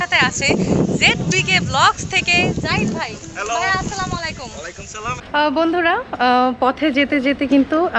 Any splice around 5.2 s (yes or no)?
yes